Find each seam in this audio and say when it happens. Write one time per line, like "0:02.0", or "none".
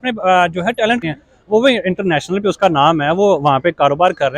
0:01.0